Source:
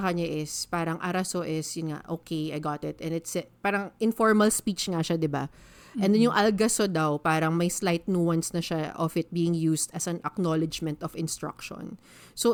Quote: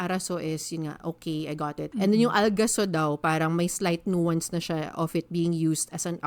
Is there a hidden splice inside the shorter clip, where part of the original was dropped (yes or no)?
yes